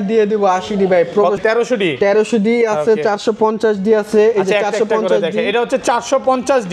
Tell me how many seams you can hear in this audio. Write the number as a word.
one